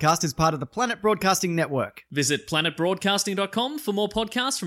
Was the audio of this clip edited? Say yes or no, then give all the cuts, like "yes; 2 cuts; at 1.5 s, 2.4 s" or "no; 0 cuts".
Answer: no; 0 cuts